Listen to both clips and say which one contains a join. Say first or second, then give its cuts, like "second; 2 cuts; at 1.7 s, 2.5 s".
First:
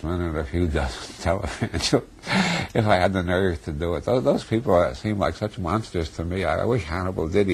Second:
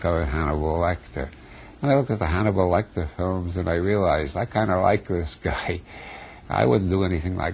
second; 1 cut; at 1.9 s